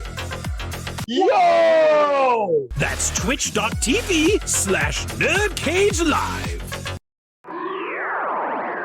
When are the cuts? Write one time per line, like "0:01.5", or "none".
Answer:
0:07.6